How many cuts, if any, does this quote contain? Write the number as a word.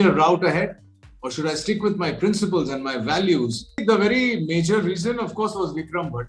one